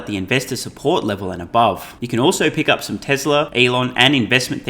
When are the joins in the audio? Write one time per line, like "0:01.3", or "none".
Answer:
0:01.9
0:03.5